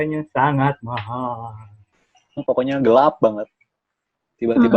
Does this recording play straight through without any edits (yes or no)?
no